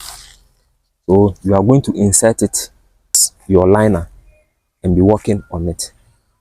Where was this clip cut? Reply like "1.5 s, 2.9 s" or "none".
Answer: 3.3 s